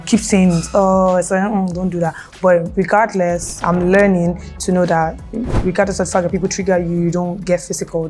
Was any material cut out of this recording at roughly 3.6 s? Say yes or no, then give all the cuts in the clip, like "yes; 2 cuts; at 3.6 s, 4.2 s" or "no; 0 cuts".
yes; 1 cut; at 3.6 s